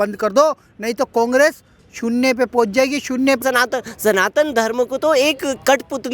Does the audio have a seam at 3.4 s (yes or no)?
yes